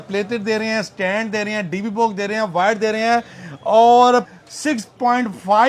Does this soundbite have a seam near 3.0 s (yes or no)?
no